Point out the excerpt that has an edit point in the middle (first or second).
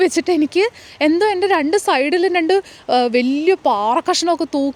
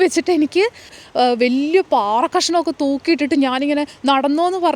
second